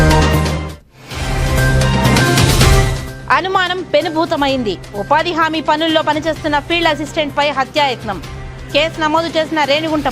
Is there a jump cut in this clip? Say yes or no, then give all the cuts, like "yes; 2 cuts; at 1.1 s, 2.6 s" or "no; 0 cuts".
yes; 1 cut; at 3.0 s